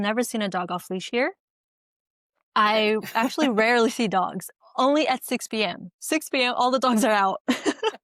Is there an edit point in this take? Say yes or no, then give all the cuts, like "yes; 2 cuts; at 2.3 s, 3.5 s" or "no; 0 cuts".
no; 0 cuts